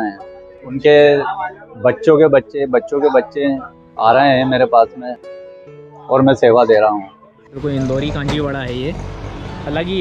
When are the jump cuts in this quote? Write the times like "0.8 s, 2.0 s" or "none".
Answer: 7.5 s